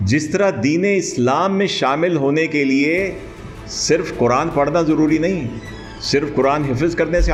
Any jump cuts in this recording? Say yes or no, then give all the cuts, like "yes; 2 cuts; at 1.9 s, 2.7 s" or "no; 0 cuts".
no; 0 cuts